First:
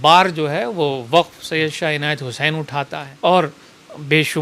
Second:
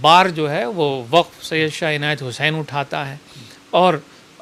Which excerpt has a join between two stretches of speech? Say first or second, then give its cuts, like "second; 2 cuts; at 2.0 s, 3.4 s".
first; 1 cut; at 3.0 s